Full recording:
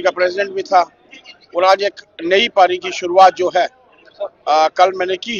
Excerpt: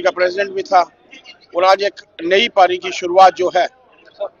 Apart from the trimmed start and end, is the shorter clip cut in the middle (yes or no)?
no